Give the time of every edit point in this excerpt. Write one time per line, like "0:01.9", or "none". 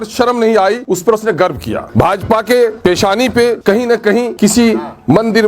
0:00.8
0:01.8
0:02.8
0:03.9

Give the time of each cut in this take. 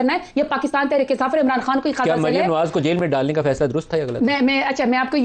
none

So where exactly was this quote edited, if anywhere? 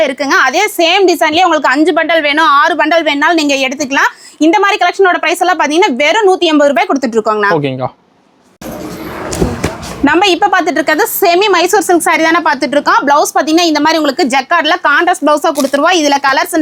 none

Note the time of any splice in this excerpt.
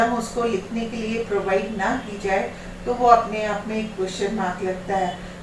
none

